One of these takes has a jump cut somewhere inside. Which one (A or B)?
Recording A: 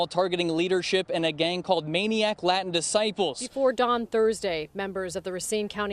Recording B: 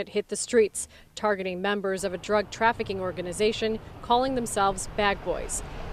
A